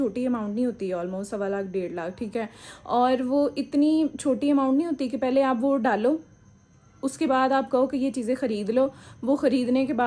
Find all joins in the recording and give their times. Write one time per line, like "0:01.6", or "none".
none